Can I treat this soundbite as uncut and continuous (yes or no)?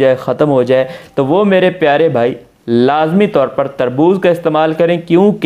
yes